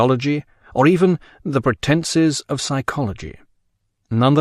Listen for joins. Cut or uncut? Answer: cut